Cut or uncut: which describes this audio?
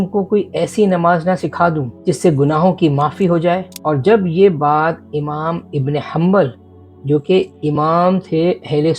cut